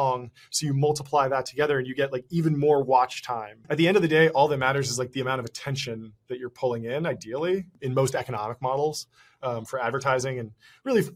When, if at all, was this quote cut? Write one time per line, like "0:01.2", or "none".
0:03.6
0:07.7